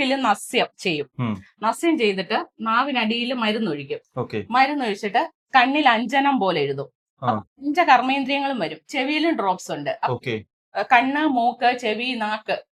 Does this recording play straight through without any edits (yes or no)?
yes